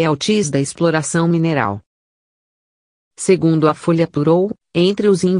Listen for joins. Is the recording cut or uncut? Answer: uncut